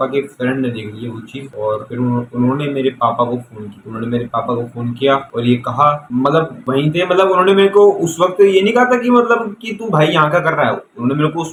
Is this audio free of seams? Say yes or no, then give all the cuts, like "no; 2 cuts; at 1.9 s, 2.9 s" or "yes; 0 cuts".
yes; 0 cuts